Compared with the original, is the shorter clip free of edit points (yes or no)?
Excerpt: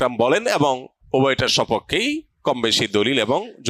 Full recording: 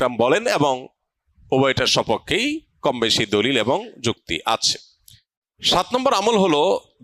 no